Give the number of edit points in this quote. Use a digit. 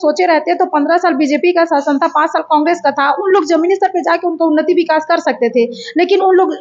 0